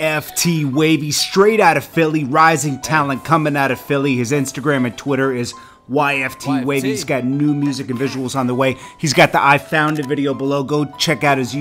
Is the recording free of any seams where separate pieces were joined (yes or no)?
yes